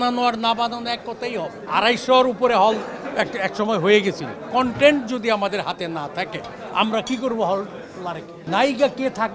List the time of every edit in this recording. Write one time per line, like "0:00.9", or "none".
0:01.6
0:04.3
0:08.3